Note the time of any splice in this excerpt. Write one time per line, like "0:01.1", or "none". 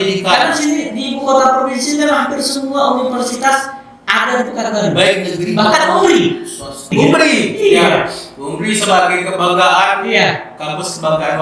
0:06.9

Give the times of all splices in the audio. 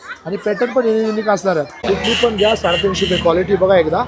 0:01.8

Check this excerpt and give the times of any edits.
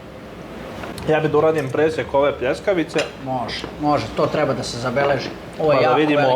0:00.9

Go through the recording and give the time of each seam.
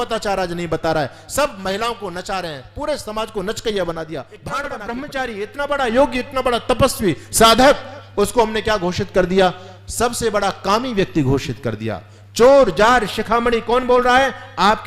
0:04.6

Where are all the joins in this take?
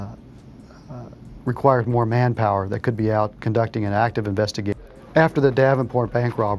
none

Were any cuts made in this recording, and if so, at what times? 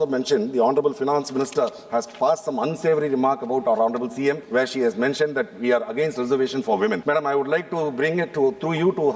0:04.4
0:07.0

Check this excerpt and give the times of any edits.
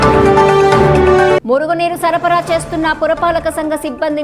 0:01.4

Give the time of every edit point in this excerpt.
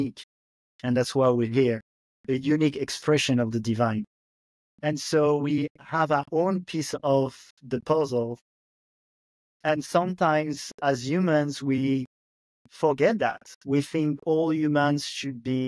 none

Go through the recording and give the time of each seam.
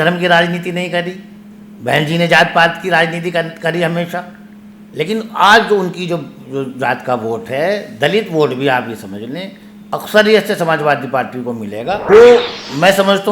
0:01.0
0:12.0

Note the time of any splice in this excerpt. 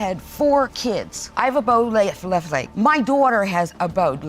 0:00.9

